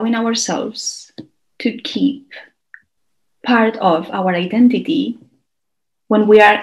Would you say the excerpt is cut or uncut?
uncut